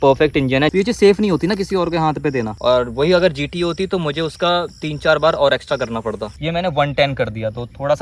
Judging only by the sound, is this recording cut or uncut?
cut